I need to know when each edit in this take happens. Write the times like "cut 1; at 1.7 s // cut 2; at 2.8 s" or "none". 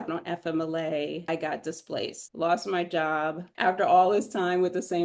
cut 1; at 1.2 s // cut 2; at 2.2 s // cut 3; at 3.4 s